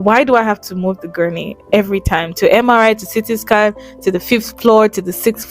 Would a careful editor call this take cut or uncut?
uncut